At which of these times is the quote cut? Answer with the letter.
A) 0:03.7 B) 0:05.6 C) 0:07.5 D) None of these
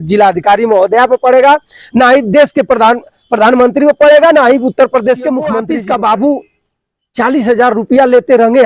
B